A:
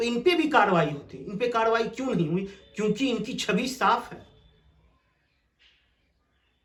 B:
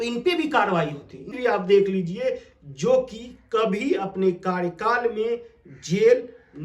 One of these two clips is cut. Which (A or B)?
B